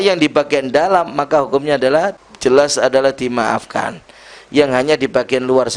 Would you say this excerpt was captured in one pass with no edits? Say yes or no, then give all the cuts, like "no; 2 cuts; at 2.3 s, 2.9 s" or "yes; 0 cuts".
no; 1 cut; at 2.2 s